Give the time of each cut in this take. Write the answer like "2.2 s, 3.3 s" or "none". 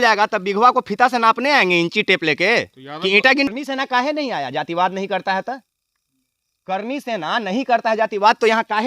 3.5 s